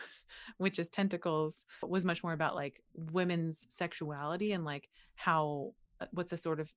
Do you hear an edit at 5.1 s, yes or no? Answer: no